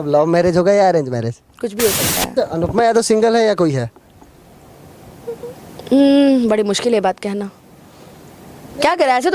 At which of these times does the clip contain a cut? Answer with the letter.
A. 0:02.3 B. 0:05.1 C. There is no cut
A